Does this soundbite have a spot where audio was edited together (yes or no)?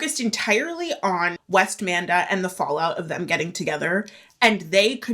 yes